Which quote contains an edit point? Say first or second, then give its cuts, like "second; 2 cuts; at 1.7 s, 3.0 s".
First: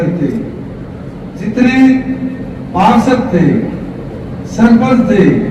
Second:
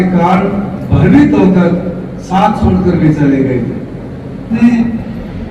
second; 1 cut; at 4.6 s